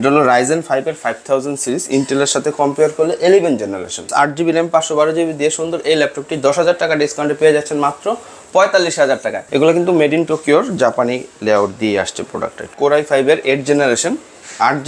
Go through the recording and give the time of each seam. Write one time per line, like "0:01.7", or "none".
0:04.1
0:09.4
0:12.7